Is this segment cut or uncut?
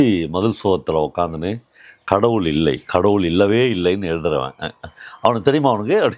uncut